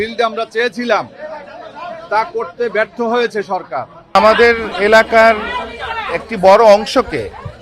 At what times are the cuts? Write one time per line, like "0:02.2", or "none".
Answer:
0:04.2